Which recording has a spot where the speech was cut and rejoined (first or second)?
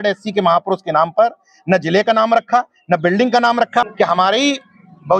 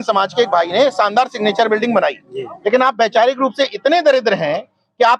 first